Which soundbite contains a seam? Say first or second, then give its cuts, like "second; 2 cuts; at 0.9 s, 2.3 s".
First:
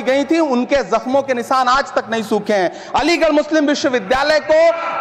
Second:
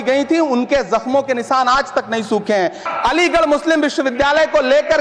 second; 1 cut; at 2.8 s